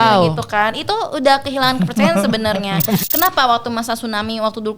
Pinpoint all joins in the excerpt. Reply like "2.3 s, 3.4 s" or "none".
3.0 s